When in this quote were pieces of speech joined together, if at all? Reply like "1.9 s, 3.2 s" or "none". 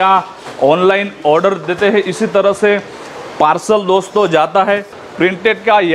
5.0 s